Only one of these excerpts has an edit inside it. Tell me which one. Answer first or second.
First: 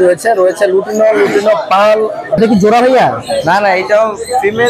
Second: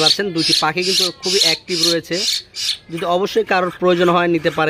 first